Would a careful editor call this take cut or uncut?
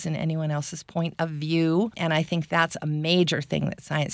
cut